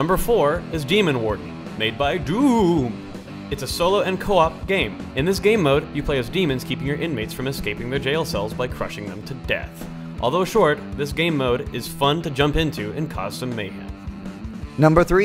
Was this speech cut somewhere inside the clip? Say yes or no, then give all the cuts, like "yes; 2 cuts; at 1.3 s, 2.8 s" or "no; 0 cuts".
yes; 1 cut; at 10.7 s